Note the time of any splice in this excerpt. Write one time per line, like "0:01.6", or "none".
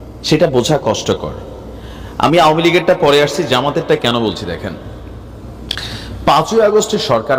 none

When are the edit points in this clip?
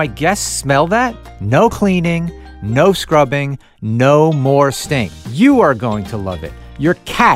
0:01.3
0:05.2

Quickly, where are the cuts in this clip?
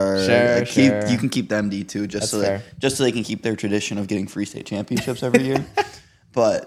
none

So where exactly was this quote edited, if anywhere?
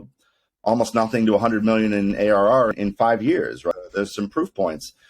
0:02.7
0:03.7

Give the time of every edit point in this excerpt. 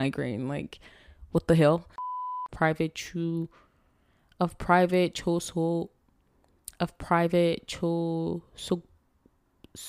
none

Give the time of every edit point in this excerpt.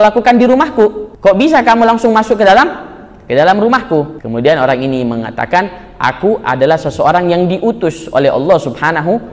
0:01.1
0:04.2

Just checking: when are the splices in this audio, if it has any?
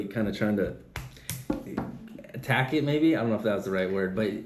none

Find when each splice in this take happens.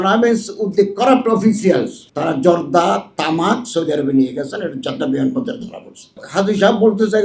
0:02.0
0:06.2

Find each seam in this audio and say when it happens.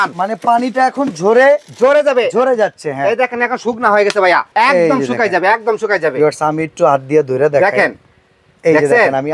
0:04.5

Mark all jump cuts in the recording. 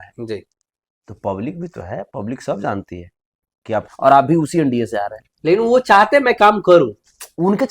0:03.9

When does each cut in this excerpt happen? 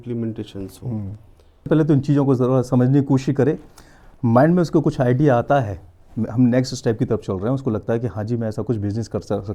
0:01.7

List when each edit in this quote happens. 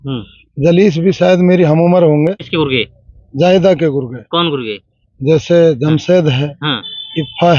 0:02.4

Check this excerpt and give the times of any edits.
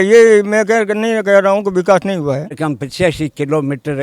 0:02.6

